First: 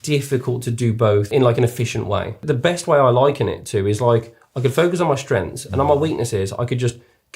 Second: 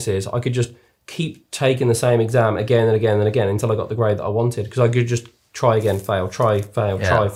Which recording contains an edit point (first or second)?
first